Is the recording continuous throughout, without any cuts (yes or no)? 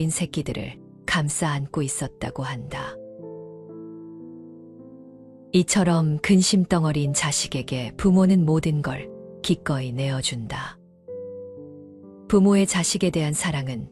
yes